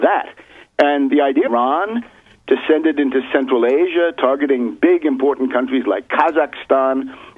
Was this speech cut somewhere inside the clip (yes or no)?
no